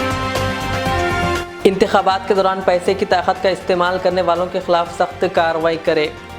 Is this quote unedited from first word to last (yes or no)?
no